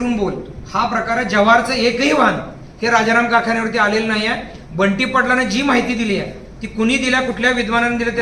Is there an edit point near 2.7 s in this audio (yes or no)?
no